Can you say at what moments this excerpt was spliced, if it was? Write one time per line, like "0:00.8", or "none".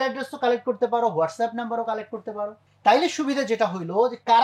0:02.7